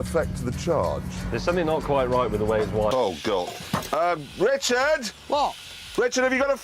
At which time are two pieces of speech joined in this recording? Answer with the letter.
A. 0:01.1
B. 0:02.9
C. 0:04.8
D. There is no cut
B